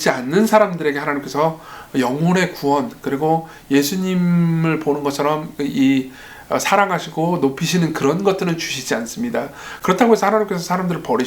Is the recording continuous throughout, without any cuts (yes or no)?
yes